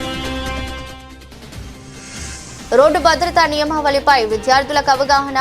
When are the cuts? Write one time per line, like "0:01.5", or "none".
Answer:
none